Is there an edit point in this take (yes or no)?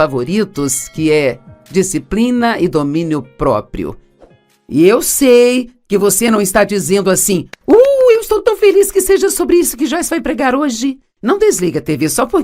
no